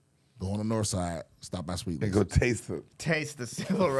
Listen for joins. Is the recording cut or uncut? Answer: uncut